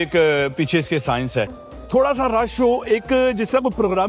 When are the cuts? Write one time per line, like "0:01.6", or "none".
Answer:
0:01.6